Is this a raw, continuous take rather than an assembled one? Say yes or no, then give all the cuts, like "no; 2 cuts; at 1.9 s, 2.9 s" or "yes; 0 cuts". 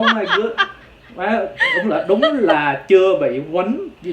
yes; 0 cuts